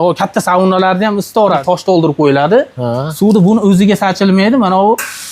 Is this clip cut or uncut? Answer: cut